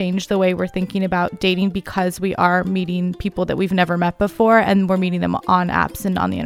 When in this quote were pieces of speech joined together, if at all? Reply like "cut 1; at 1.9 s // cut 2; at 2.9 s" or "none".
none